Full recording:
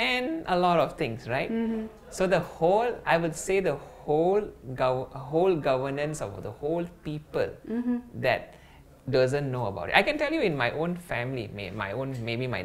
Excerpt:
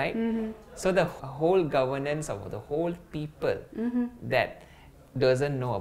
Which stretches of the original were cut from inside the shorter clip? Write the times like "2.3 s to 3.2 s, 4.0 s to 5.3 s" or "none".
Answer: 2.5 s to 5.1 s